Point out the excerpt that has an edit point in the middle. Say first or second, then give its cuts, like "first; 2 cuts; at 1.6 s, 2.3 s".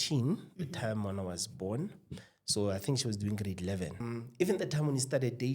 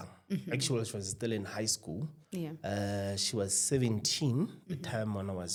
first; 1 cut; at 4.0 s